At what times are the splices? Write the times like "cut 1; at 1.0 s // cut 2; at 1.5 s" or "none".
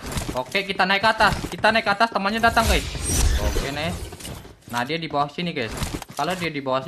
cut 1; at 3.2 s